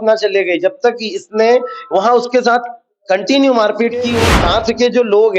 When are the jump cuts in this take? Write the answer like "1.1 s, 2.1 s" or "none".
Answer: 4.2 s